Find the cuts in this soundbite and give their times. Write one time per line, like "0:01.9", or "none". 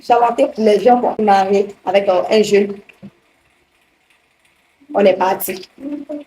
0:01.2